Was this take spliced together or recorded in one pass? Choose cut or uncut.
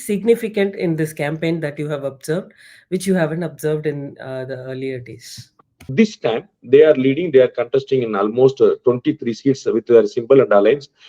cut